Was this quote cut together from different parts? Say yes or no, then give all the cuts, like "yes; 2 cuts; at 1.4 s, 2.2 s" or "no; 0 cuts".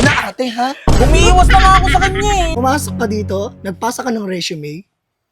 yes; 1 cut; at 2.5 s